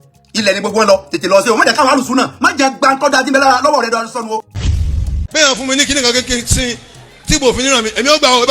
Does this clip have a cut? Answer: yes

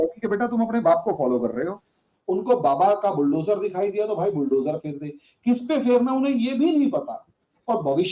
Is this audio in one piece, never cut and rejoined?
yes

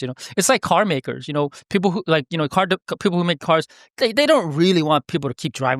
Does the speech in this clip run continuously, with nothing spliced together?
yes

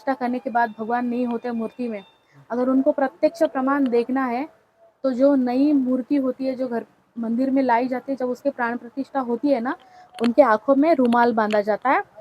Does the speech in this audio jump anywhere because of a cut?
no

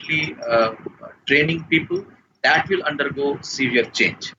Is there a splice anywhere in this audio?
no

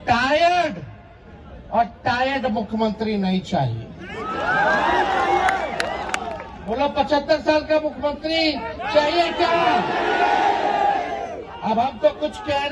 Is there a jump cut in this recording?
no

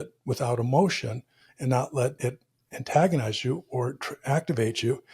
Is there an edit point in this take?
yes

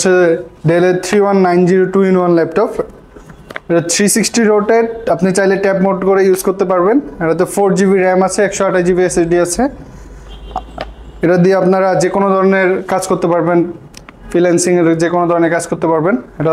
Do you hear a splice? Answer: no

